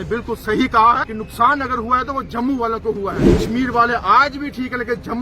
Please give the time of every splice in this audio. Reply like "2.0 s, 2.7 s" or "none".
1.2 s, 3.3 s